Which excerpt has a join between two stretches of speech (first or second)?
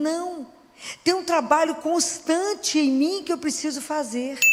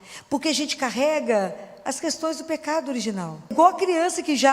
second